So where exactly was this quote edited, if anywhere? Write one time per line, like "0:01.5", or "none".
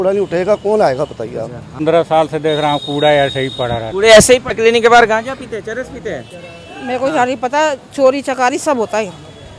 0:01.8
0:04.6